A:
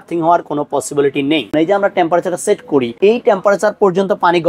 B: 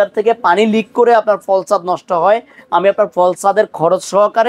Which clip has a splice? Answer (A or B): A